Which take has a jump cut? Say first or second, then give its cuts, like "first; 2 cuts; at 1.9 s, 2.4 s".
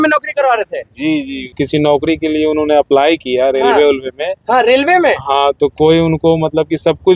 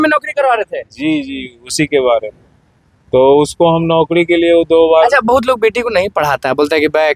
first; 1 cut; at 1.5 s